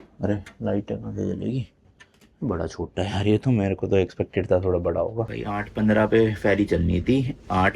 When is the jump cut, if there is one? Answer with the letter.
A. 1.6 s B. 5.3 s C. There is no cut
B